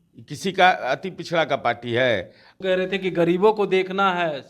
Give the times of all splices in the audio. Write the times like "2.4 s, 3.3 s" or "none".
2.4 s